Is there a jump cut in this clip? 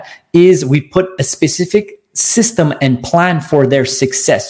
no; 0 cuts

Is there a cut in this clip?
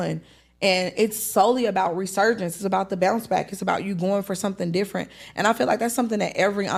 no; 0 cuts

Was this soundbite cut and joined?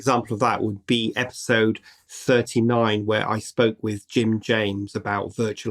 no; 0 cuts

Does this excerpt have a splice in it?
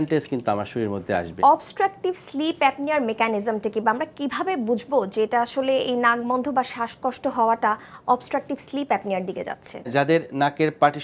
yes; 2 cuts; at 1.3 s, 9.8 s

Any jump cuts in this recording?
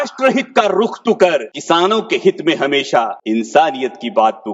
yes; 2 cuts; at 1.5 s, 3.2 s

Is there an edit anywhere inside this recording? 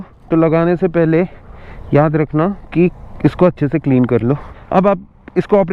yes; 1 cut; at 4.5 s

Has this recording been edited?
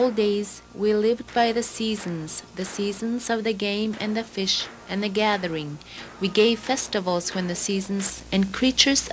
no; 0 cuts

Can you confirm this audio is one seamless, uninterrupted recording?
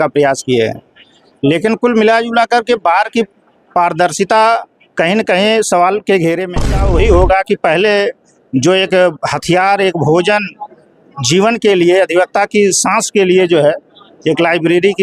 no; 1 cut; at 6.6 s

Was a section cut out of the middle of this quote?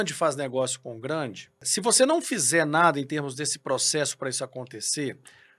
yes; 1 cut; at 1.7 s

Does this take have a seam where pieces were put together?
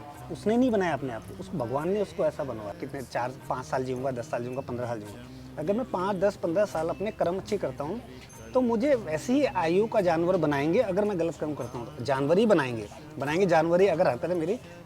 yes; 1 cut; at 2.7 s

